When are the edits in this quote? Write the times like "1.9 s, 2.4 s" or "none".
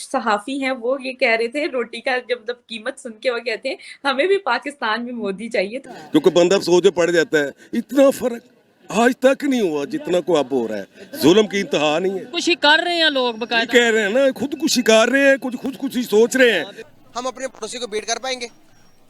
5.8 s, 12.3 s, 16.8 s